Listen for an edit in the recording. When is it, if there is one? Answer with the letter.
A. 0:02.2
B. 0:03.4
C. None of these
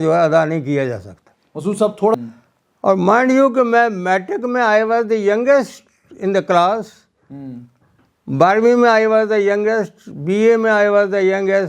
A